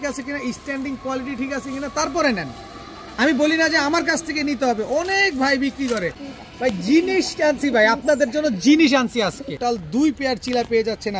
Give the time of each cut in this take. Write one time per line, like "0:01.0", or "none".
0:06.3
0:09.6